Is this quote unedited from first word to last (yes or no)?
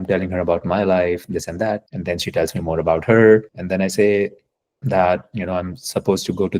no